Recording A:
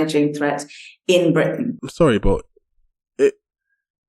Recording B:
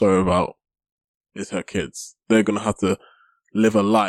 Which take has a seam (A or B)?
A